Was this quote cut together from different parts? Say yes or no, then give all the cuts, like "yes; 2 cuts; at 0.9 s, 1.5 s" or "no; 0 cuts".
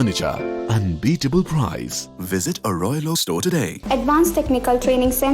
yes; 1 cut; at 3.8 s